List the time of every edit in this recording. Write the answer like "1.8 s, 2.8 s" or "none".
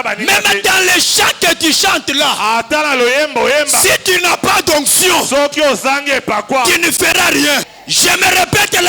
7.7 s